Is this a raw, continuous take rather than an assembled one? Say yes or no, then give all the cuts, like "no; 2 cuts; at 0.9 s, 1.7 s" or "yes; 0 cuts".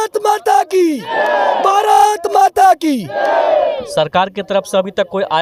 yes; 0 cuts